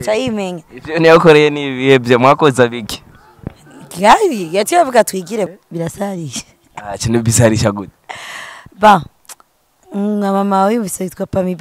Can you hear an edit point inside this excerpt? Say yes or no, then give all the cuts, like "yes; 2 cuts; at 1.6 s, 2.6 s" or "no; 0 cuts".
yes; 1 cut; at 5.5 s